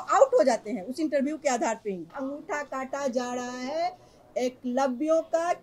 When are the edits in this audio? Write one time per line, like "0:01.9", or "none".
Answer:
0:02.1